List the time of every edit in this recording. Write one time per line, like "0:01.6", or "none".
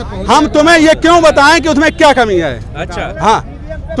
none